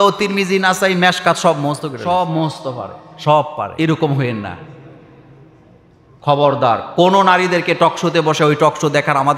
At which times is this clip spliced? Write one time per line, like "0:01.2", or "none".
0:02.0
0:03.7